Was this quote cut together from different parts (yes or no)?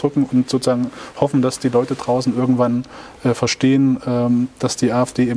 no